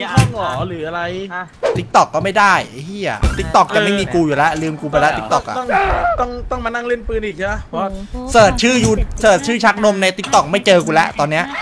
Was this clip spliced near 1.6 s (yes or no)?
yes